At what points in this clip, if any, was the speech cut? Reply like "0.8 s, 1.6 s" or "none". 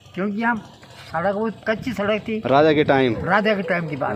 none

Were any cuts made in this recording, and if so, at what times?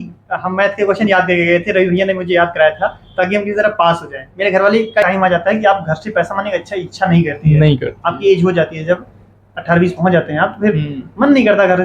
5.0 s

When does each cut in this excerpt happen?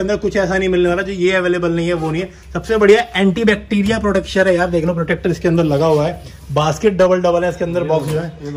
none

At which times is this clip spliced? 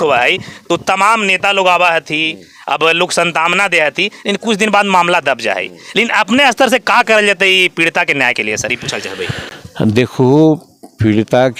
none

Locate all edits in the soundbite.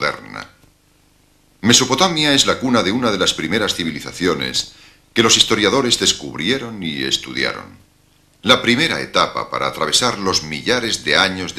none

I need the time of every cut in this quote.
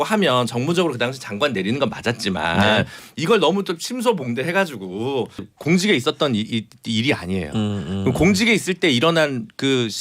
5.5 s

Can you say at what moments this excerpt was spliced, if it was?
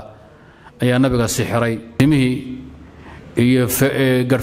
1.9 s

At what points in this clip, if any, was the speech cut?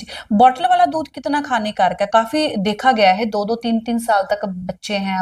none

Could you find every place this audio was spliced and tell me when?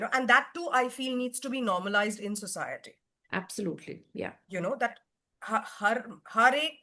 none

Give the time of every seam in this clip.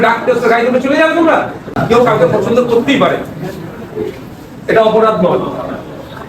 1.8 s

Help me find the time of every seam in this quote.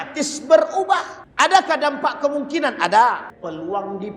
1.2 s, 3.3 s

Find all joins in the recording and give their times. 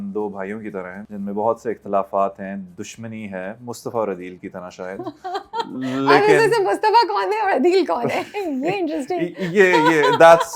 1.0 s

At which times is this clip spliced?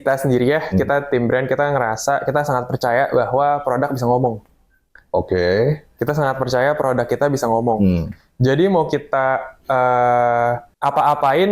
none

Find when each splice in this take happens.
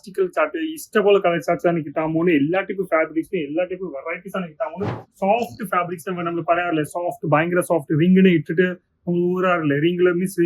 5.0 s

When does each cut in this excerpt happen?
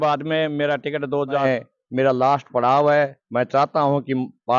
1.4 s

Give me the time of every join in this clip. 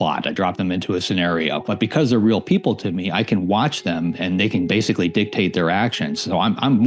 1.6 s

